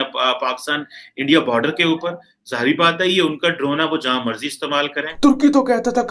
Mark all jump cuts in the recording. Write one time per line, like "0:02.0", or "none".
0:05.1